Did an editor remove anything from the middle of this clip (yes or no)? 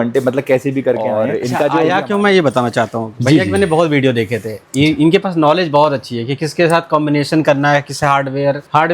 yes